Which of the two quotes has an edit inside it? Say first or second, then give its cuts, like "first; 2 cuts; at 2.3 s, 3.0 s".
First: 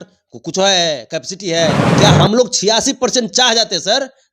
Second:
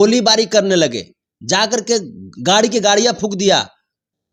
first; 1 cut; at 1.9 s